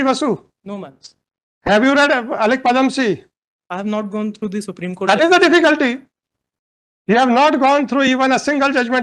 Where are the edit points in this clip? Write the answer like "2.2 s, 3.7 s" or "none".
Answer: none